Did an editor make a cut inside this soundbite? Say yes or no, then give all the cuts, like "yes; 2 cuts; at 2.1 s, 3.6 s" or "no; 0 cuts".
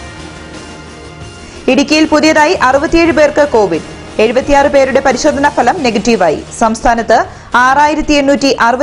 no; 0 cuts